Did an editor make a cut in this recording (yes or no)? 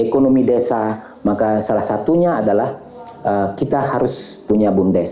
no